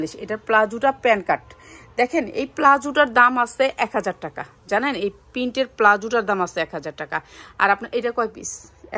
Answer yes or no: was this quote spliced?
no